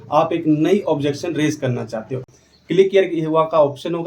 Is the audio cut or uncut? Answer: cut